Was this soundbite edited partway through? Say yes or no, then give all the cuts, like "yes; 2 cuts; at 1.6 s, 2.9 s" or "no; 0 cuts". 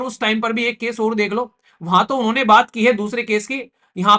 no; 0 cuts